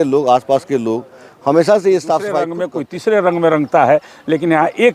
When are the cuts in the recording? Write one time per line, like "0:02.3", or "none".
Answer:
0:02.6